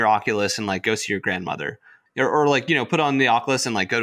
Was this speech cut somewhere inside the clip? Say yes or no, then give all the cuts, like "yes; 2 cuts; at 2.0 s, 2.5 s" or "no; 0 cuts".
yes; 1 cut; at 2.0 s